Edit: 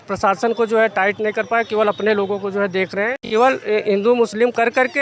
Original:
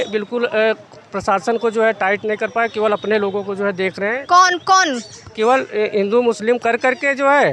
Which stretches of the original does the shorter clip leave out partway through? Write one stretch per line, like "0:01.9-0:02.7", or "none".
0:04.2-0:05.2